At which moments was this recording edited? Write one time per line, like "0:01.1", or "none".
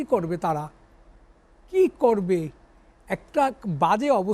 none